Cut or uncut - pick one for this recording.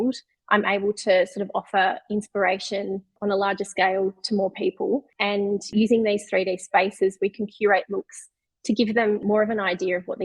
cut